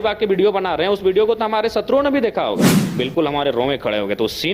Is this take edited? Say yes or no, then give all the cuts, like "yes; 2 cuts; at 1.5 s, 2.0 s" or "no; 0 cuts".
yes; 1 cut; at 2.8 s